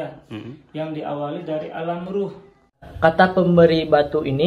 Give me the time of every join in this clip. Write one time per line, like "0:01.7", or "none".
0:02.9